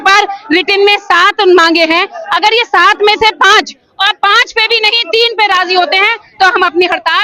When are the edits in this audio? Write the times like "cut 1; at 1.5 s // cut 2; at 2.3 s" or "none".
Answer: none